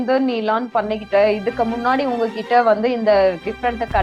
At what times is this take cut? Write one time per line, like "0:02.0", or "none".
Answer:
none